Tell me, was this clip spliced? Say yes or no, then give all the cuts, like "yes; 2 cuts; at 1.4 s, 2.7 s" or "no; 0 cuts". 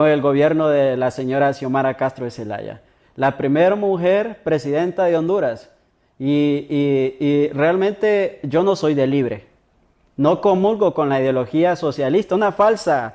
no; 0 cuts